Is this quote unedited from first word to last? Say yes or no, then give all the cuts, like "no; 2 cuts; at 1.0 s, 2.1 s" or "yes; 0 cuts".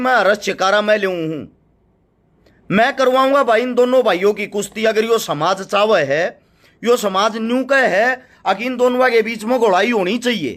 yes; 0 cuts